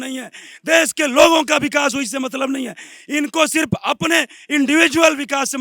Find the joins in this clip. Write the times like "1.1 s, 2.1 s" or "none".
none